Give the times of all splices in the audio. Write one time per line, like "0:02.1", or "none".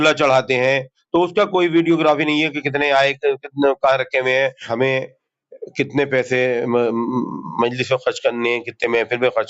0:04.7